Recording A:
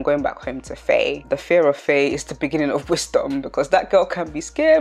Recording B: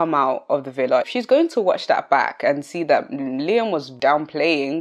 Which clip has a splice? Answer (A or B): B